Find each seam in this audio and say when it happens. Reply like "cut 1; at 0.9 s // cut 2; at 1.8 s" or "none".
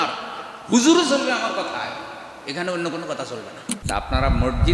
cut 1; at 3.7 s